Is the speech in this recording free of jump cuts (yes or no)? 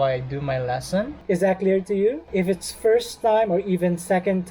no